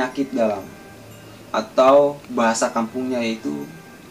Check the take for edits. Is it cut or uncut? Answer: uncut